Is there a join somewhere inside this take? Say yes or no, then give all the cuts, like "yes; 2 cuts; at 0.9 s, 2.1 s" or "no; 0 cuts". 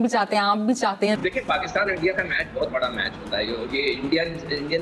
yes; 1 cut; at 1.1 s